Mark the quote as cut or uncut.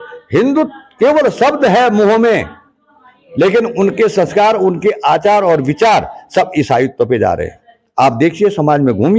uncut